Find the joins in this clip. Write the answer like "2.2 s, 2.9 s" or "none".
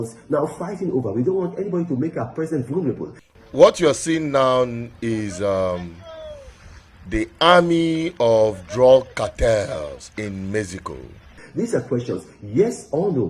3.2 s, 11.4 s